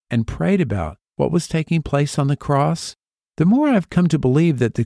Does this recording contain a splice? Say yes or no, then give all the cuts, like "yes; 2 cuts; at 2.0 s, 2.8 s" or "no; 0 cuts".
yes; 1 cut; at 1.0 s